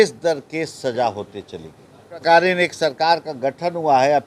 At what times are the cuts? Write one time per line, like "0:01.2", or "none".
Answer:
0:02.2